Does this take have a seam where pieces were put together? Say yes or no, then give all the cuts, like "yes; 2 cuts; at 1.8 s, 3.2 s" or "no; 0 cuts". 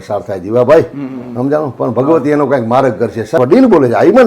yes; 1 cut; at 3.4 s